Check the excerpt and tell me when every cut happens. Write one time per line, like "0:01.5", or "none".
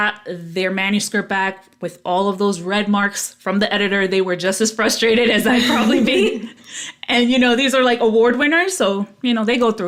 none